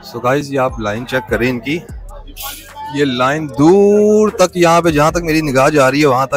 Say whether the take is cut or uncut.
uncut